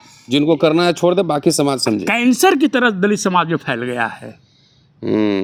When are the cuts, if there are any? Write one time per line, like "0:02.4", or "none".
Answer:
none